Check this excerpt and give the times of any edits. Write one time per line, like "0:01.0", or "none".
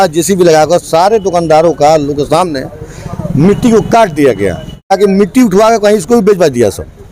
0:04.9